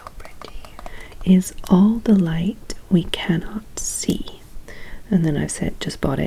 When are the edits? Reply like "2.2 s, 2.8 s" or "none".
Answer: 1.0 s